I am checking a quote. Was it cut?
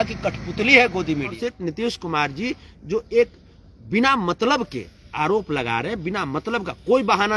yes; 1 cut; at 1.3 s

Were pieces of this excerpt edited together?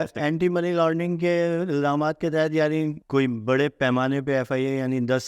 yes; 1 cut; at 3.0 s

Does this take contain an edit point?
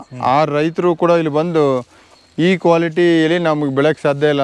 no; 0 cuts

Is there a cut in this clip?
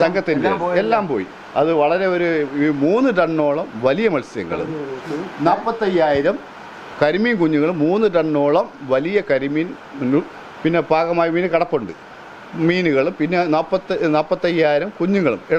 no; 0 cuts

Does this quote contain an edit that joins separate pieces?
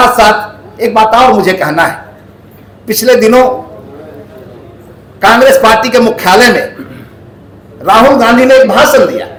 no; 0 cuts

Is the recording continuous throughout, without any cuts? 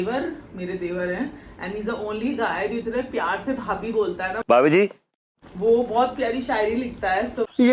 yes; 0 cuts

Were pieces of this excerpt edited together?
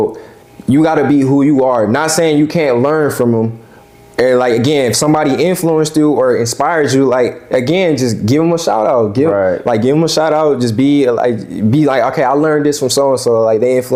no; 0 cuts

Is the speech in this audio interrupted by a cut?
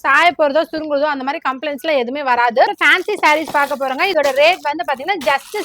yes; 2 cuts; at 2.7 s, 4.1 s

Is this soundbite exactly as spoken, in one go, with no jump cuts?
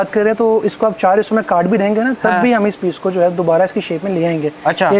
yes; 0 cuts

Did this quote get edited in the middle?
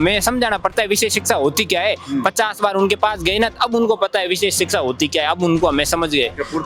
no; 0 cuts

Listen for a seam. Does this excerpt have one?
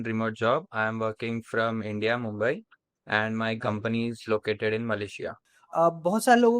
yes; 1 cut; at 5.4 s

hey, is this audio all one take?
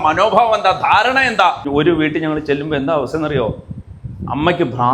no; 1 cut; at 1.6 s

